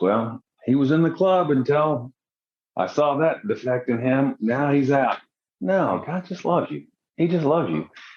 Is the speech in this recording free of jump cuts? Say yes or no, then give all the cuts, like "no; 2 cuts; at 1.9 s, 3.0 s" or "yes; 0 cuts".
yes; 0 cuts